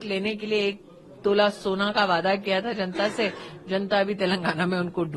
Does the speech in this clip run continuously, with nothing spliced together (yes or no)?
yes